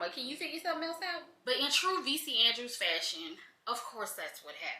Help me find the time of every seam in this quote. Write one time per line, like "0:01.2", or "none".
0:01.3